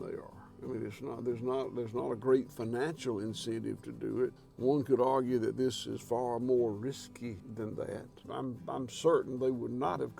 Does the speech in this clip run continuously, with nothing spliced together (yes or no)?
no